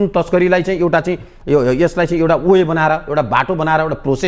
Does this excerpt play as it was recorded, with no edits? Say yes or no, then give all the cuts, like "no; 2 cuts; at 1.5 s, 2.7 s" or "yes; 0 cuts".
yes; 0 cuts